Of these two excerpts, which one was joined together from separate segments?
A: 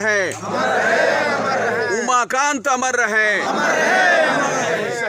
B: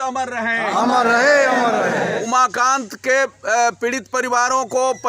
B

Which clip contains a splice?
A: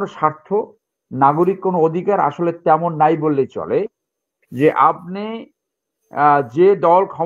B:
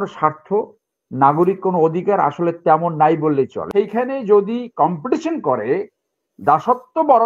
B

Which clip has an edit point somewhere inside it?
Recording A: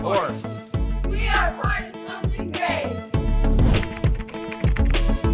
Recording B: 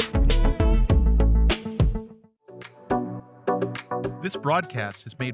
B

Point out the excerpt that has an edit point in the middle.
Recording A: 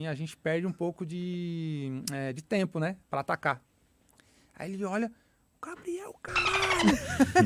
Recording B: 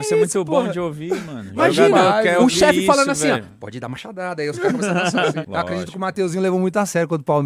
B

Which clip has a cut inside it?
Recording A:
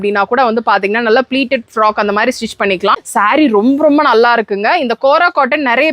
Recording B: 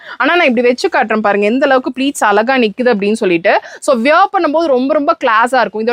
A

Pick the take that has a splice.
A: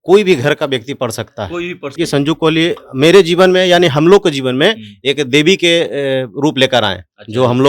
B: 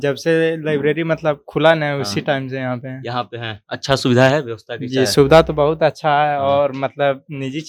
A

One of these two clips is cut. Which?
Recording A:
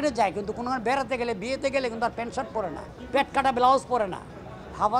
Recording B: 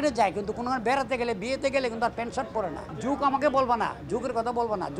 B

